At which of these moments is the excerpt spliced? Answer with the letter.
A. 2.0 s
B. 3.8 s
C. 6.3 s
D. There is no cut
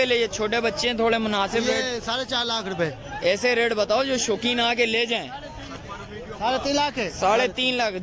D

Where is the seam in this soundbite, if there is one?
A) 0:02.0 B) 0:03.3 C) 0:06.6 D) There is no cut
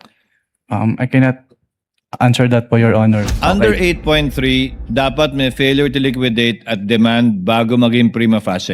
B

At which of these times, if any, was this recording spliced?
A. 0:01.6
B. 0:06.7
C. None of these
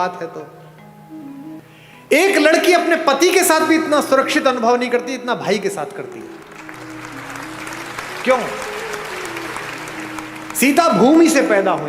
A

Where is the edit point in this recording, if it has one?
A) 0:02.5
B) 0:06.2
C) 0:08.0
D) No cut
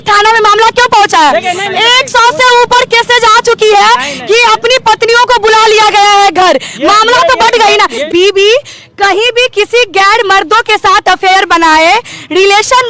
C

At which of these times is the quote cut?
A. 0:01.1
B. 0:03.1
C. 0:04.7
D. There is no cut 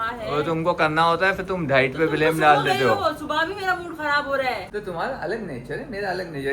C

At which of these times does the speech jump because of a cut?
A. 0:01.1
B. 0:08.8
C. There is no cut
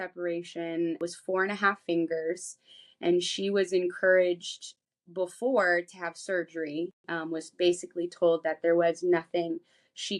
A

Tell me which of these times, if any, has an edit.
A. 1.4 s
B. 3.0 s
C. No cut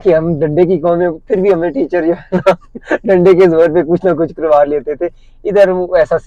C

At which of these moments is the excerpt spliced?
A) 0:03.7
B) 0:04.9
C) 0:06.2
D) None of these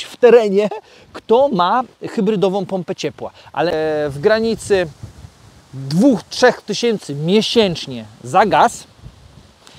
A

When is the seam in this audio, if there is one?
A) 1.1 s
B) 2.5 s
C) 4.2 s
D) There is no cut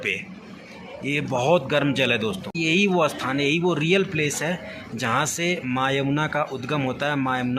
B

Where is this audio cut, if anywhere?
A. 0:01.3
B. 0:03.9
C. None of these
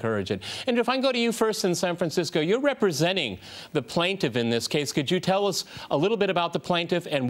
B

